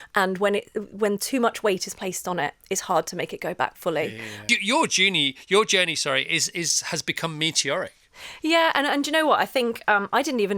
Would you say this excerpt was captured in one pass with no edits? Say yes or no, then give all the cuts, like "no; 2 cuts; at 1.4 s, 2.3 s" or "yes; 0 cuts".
no; 1 cut; at 4.5 s